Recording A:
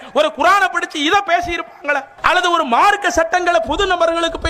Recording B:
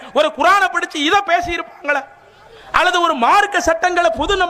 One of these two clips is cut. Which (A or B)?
A